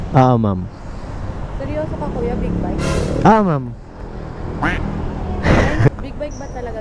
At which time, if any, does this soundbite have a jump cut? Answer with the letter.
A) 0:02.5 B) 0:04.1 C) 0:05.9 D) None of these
C